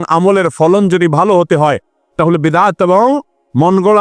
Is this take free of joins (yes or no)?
yes